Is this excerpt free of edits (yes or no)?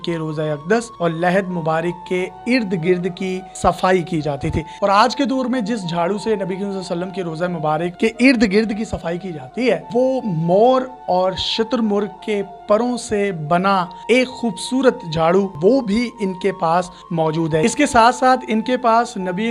no